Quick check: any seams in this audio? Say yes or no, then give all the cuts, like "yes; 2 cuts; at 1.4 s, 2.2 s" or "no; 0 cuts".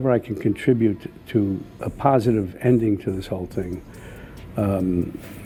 no; 0 cuts